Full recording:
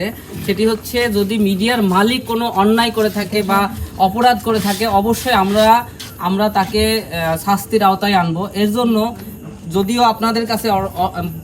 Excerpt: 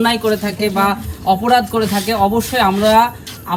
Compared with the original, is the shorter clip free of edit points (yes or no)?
yes